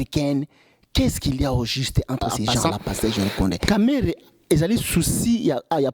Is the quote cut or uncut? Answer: cut